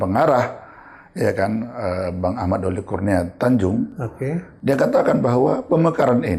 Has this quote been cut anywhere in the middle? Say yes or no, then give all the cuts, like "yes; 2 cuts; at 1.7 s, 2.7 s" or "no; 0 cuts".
no; 0 cuts